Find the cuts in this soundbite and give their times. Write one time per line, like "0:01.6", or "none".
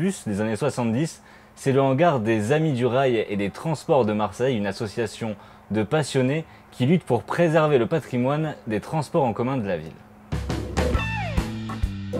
0:02.9